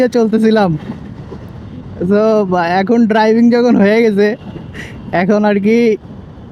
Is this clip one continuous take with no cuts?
yes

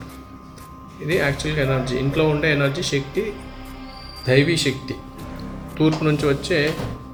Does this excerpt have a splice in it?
no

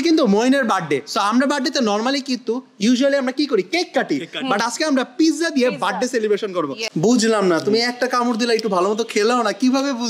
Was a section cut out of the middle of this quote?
yes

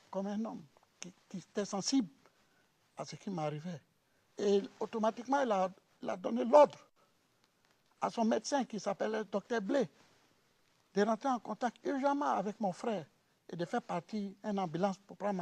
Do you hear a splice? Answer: yes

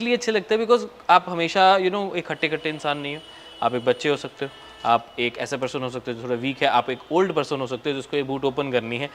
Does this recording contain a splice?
no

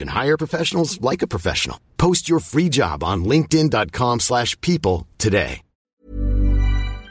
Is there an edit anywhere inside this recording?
yes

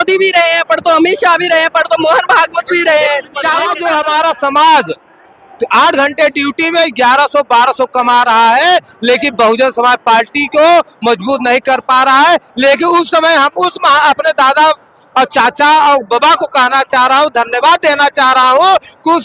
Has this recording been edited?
yes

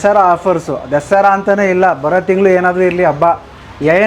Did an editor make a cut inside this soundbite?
no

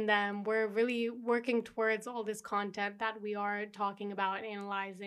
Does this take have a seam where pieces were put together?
no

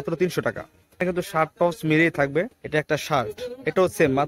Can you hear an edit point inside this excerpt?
yes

